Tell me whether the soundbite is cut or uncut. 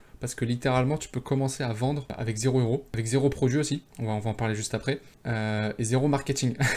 cut